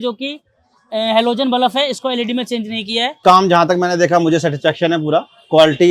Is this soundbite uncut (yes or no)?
no